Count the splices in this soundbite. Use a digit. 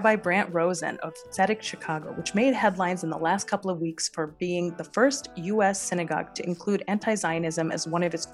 0